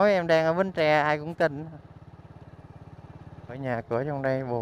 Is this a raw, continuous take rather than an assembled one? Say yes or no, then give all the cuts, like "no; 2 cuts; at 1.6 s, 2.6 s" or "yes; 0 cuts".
no; 1 cut; at 3.6 s